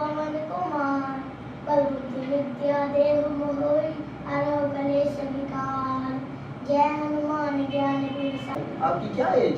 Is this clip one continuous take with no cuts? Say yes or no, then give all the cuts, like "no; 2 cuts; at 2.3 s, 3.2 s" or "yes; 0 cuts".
no; 1 cut; at 8.6 s